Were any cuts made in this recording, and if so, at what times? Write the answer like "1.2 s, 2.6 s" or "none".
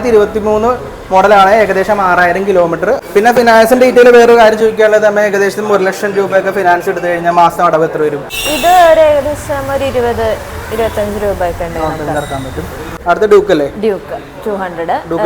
3.0 s, 8.2 s, 12.8 s